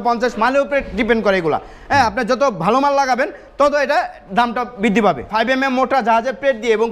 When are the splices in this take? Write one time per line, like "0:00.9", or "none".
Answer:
0:05.2